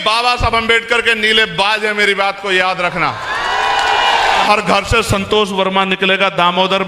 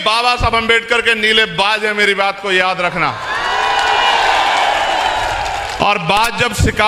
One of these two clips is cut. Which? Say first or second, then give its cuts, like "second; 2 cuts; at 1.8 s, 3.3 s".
first; 1 cut; at 4.5 s